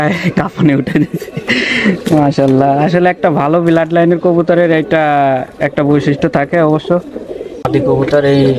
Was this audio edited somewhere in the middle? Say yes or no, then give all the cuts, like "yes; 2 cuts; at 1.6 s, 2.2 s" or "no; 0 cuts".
yes; 1 cut; at 7.6 s